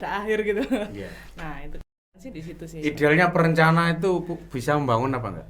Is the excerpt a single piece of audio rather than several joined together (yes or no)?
yes